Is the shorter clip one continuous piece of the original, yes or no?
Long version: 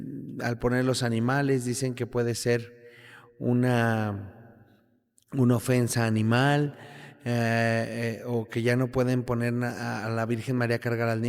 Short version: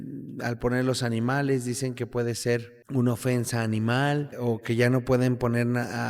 no